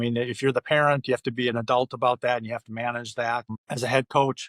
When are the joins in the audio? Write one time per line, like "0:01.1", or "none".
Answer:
0:03.6